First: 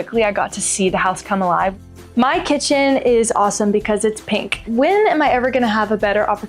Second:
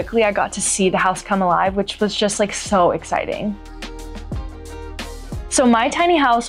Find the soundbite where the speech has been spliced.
first; 2 cuts; at 1.8 s, 4.6 s

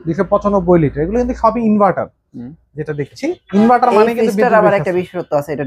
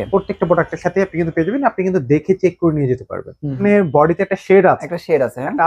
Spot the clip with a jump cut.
second; 1 cut; at 3.6 s

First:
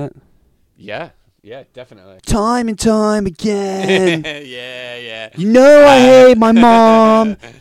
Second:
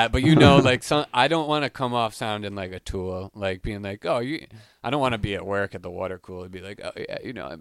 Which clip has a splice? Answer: first; 1 cut; at 2.1 s

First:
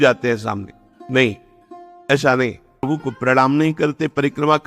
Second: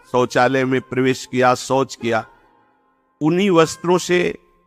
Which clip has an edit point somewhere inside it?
first; 1 cut; at 2.9 s

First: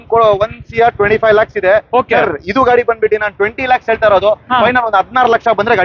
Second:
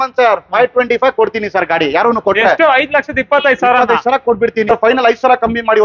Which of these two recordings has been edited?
second; 1 cut; at 4.7 s

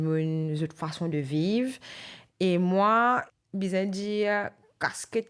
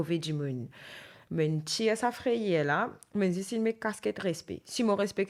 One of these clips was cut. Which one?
first; 1 cut; at 3.2 s

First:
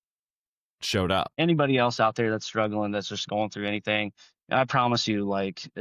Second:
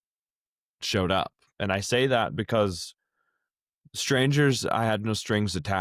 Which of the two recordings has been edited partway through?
first; 1 cut; at 1.3 s

